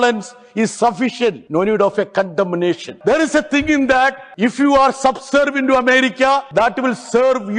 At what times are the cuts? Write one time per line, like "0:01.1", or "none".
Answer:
0:01.4
0:02.9
0:04.2
0:06.5